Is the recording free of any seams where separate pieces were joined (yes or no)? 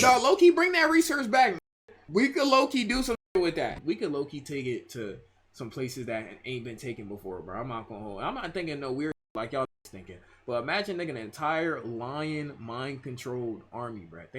no